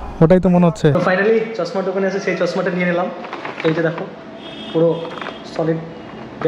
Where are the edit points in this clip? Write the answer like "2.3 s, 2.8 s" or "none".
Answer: 0.9 s